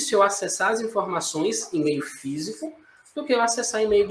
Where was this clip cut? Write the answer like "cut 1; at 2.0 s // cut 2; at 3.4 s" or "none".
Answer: none

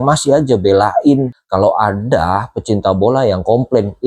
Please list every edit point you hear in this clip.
cut 1; at 1.4 s

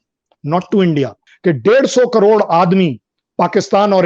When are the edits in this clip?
cut 1; at 1.2 s

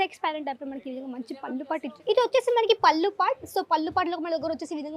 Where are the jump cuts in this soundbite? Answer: cut 1; at 1.9 s

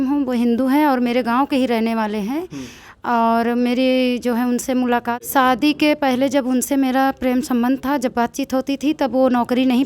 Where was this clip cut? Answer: cut 1; at 5.2 s

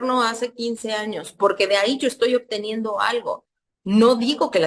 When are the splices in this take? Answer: cut 1; at 3.5 s

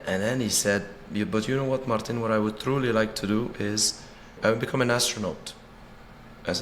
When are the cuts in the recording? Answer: cut 1; at 4.3 s

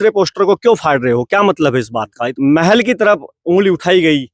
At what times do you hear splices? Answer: cut 1; at 2.3 s

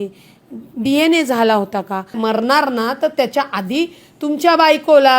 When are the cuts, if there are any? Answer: cut 1; at 2.2 s

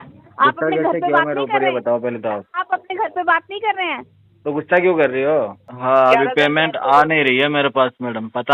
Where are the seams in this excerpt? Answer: cut 1; at 5.6 s

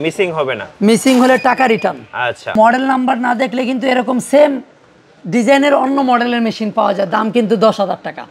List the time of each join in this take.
cut 1; at 2.5 s

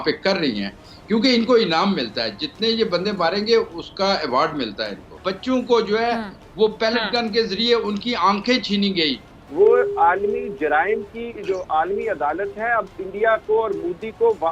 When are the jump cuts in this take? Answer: cut 1; at 9.4 s

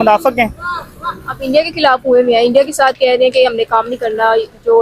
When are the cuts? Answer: none

